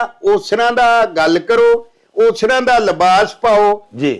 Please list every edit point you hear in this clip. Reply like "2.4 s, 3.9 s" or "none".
none